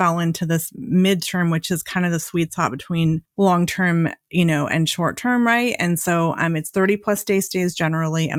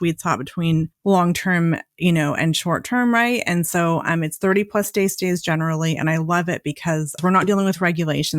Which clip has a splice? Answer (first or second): second